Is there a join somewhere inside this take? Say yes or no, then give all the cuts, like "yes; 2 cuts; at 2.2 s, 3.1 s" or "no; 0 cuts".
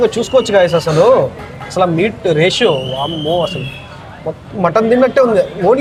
no; 0 cuts